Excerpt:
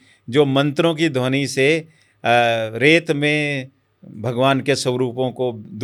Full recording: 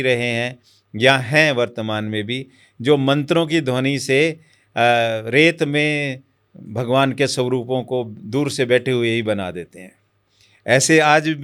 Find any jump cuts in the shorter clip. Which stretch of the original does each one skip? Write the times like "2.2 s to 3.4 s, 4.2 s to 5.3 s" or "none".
none